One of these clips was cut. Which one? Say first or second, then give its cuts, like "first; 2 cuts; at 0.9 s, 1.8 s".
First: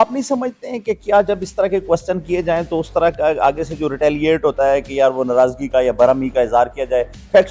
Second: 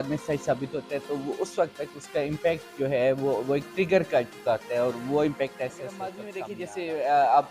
second; 1 cut; at 6.3 s